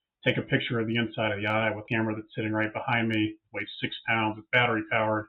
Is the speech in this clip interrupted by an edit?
yes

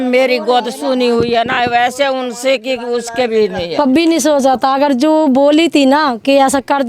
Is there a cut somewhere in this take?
yes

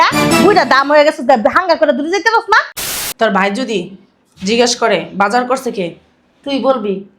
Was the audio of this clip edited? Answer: yes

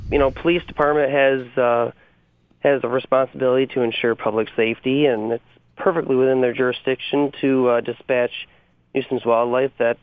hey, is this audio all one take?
yes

